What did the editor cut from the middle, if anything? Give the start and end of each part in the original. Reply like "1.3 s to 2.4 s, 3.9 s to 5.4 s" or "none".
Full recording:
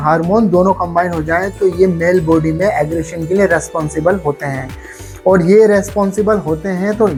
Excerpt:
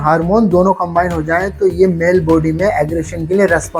none